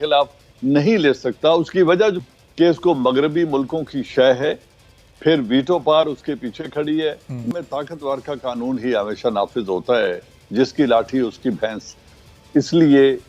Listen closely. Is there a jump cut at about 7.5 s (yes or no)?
yes